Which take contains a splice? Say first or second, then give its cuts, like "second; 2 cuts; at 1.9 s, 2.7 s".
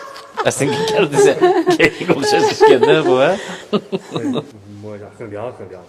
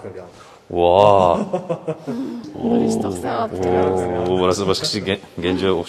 first; 1 cut; at 4.5 s